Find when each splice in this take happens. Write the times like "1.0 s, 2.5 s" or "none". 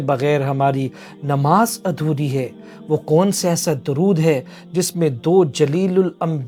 none